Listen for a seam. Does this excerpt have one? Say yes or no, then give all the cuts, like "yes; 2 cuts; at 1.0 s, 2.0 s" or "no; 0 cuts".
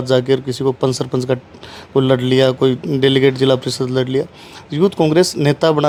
no; 0 cuts